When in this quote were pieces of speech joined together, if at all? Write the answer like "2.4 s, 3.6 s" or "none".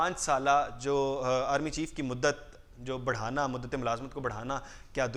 none